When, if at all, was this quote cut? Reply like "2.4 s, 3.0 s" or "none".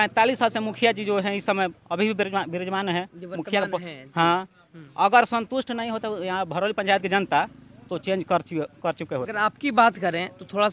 none